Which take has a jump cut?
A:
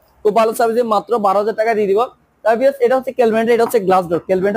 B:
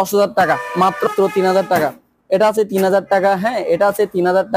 B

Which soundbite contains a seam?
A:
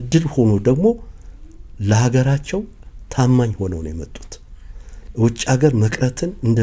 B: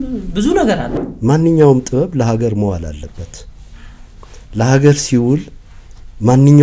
B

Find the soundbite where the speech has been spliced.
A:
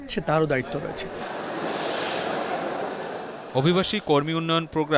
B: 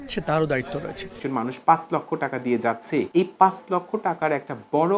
B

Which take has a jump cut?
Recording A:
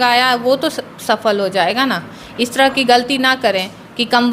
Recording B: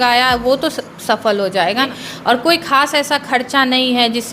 B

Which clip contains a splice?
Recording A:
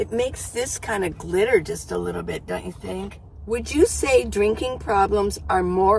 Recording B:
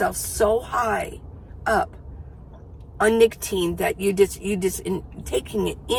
A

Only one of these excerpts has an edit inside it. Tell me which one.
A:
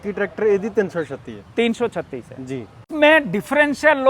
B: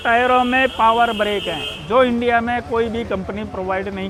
A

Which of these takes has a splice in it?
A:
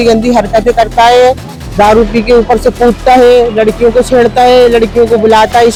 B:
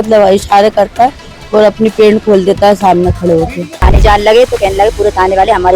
B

